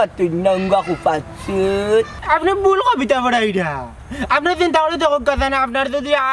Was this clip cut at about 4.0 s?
no; 1 cut; at 2.1 s

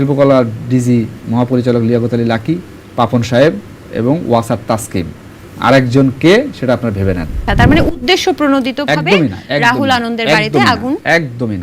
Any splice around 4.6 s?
no; 2 cuts; at 2.8 s, 7.4 s

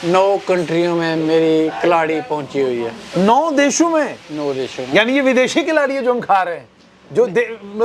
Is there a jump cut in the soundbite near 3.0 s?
no; 0 cuts

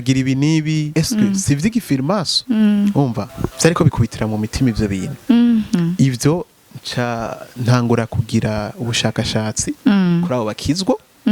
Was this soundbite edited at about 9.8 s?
no; 3 cuts; at 0.9 s, 2.3 s, 3.9 s

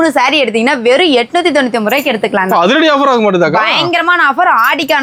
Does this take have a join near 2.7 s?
no; 0 cuts

